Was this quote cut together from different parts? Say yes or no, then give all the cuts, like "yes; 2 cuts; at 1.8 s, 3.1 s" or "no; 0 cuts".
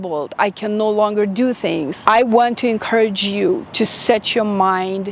no; 0 cuts